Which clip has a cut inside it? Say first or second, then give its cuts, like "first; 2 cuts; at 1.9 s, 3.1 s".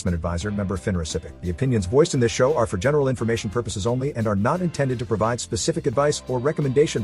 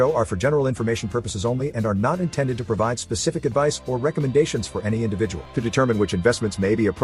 first; 1 cut; at 1.3 s